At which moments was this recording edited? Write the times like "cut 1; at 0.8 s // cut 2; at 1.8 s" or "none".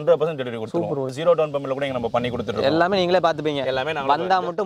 cut 1; at 1.1 s